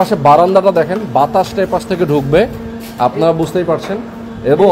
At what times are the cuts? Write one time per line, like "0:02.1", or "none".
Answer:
none